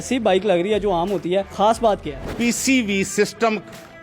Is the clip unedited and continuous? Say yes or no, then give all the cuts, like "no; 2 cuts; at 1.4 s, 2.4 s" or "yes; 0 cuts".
no; 2 cuts; at 1.5 s, 2.3 s